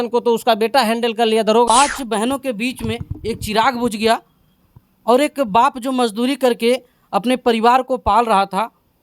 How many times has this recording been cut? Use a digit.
1